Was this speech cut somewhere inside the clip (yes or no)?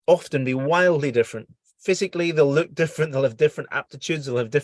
no